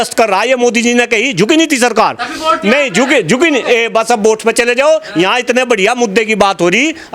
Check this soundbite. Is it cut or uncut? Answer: uncut